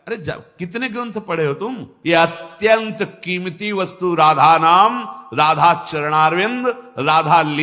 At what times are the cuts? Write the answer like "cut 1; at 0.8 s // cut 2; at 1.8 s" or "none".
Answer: cut 1; at 1.9 s